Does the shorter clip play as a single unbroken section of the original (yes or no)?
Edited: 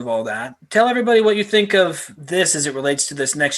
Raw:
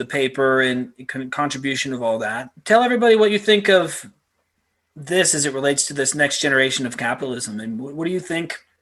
no